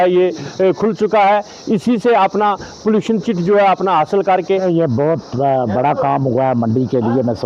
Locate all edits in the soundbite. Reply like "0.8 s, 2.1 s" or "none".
4.6 s